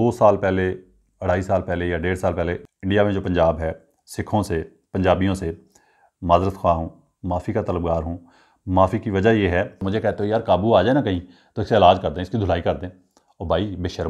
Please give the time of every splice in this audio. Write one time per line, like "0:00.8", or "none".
0:02.6
0:09.8

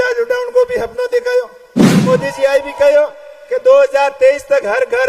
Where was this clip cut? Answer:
0:02.0

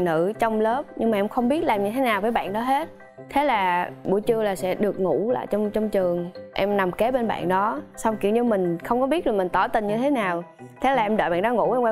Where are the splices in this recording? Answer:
none

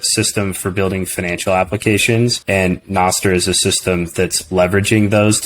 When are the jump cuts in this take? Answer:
0:02.4

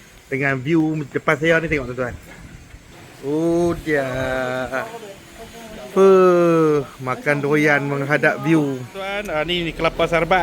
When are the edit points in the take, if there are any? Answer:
0:09.1

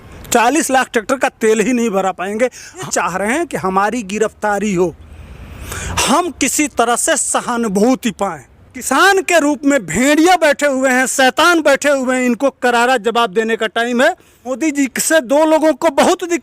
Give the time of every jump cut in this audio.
0:02.8
0:08.9
0:14.6

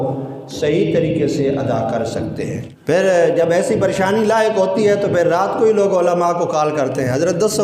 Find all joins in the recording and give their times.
0:02.7

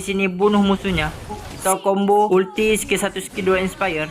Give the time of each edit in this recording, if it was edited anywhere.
0:02.3

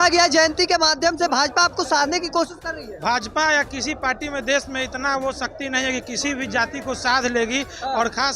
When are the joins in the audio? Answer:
none

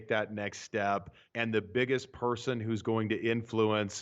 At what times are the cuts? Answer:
0:01.2

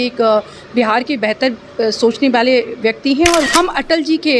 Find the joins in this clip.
0:03.5

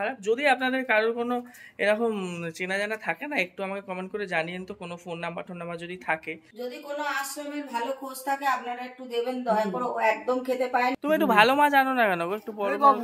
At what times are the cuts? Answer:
0:06.4
0:10.9

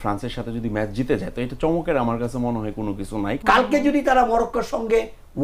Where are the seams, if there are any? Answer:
0:03.3

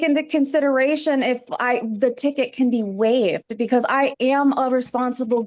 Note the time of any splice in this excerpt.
none

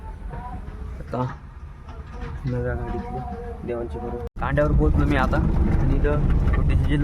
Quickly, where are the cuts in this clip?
0:04.4

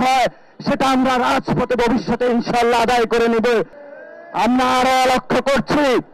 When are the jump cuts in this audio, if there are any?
0:03.8

